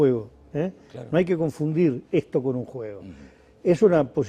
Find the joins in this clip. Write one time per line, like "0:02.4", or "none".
none